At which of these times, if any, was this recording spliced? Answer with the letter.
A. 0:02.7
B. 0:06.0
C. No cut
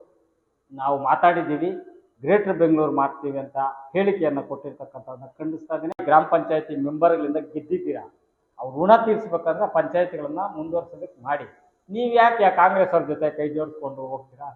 B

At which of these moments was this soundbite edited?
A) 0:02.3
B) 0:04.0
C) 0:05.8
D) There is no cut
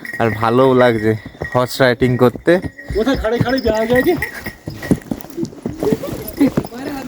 C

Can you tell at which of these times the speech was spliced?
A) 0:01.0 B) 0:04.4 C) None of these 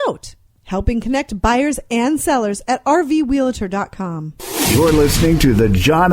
B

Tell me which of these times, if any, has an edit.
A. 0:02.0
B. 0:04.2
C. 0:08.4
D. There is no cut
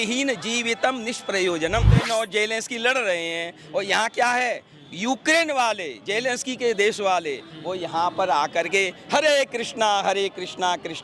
A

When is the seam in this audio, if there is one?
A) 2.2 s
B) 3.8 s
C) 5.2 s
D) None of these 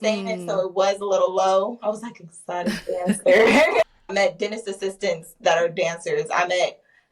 B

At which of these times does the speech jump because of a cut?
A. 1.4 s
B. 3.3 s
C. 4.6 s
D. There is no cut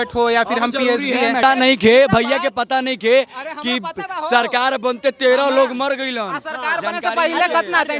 A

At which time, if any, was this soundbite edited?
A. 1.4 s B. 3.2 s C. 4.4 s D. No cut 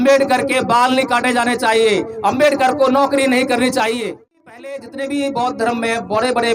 C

